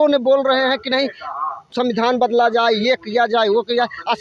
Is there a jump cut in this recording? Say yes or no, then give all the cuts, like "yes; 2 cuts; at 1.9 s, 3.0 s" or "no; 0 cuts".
no; 0 cuts